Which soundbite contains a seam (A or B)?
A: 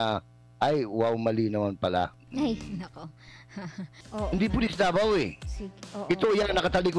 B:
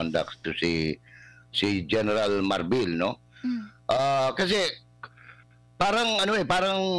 A